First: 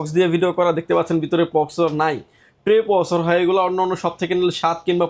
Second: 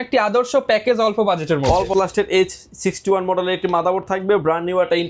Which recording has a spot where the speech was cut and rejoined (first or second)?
second